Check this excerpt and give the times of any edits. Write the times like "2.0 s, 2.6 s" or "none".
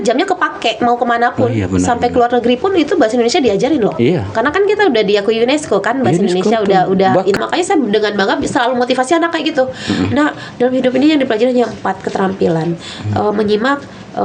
7.4 s